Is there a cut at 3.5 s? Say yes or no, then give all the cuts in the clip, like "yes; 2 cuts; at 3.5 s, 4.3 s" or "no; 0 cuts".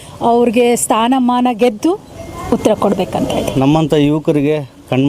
yes; 1 cut; at 3.5 s